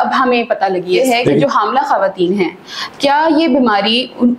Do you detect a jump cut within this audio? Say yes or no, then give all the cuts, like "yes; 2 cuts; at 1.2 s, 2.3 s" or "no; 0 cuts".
yes; 1 cut; at 1.0 s